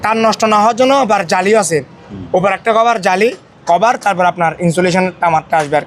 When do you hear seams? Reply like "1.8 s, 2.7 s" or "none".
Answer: none